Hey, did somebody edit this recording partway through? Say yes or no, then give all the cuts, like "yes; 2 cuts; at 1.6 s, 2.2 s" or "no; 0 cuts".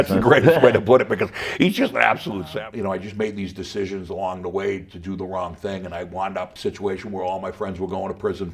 yes; 2 cuts; at 2.4 s, 6.5 s